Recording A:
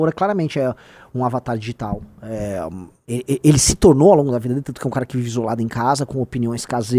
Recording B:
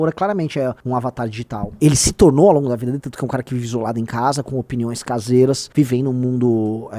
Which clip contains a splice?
B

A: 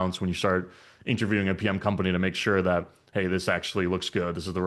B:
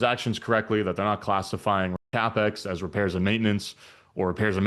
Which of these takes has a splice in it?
B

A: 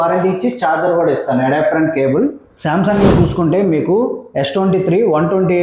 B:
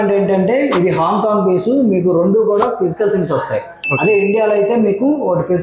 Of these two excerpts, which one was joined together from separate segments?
A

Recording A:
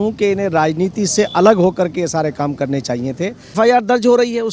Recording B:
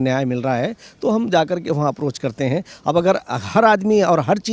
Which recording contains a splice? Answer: A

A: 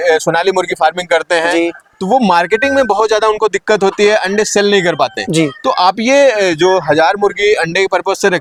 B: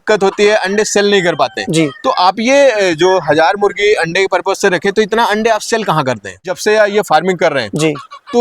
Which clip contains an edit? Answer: B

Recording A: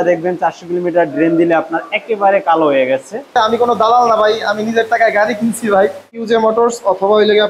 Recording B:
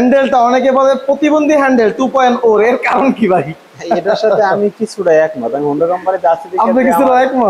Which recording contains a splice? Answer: A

